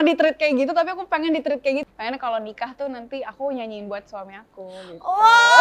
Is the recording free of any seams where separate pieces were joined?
no; 1 cut; at 1.8 s

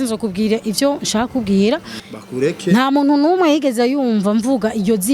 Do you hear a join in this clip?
yes; 1 cut; at 2.0 s

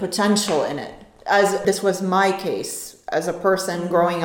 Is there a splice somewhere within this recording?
yes; 1 cut; at 1.6 s

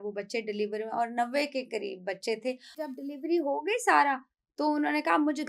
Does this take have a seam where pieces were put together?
yes; 1 cut; at 2.8 s

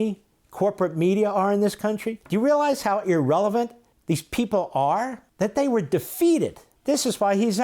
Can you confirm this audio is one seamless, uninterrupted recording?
no; 4 cuts; at 2.1 s, 3.9 s, 5.2 s, 6.7 s

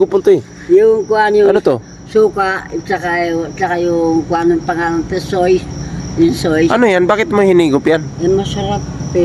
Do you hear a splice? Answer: no; 0 cuts

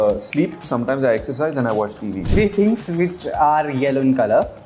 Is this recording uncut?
no; 1 cut; at 2.2 s

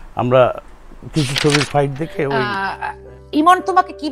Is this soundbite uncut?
no; 1 cut; at 2.5 s

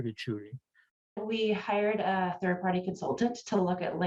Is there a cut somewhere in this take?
yes; 1 cut; at 1.2 s

